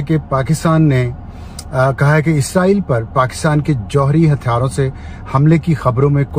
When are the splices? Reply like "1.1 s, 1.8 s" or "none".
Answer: none